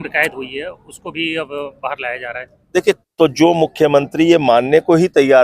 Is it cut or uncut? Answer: cut